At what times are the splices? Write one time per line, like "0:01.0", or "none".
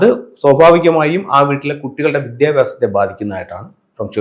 none

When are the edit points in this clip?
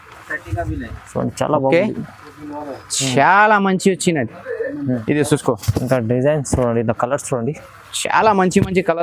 0:05.0

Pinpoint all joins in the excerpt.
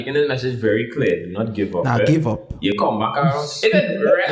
0:02.8

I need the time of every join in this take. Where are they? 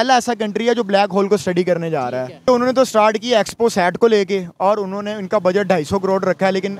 0:02.5

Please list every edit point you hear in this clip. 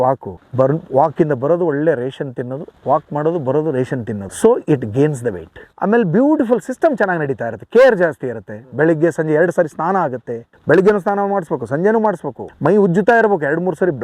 none

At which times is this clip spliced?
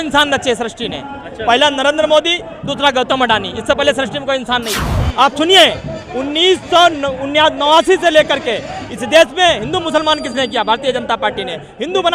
0:04.7

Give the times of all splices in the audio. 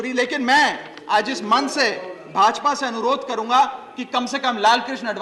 none

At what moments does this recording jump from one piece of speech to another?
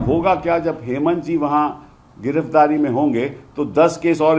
none

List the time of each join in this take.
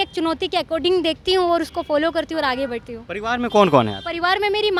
none

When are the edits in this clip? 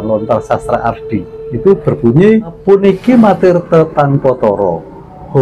0:01.4
0:02.6

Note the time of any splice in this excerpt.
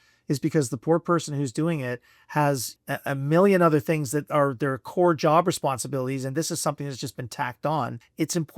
0:02.7

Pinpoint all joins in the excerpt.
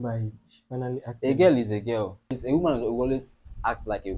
0:02.4

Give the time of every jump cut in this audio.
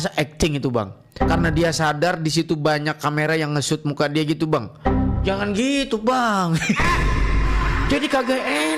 none

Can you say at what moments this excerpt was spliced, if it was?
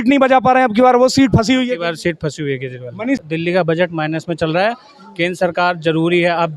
0:03.2

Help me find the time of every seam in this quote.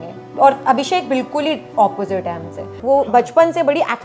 0:02.7

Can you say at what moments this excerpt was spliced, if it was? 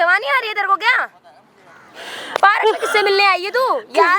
none

